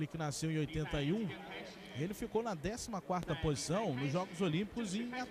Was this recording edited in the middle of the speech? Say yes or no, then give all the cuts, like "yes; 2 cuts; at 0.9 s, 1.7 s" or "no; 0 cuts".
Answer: yes; 1 cut; at 3.8 s